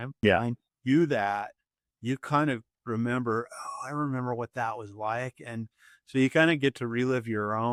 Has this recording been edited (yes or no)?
no